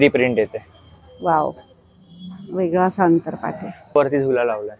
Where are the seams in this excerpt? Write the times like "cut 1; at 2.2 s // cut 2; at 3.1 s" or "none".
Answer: none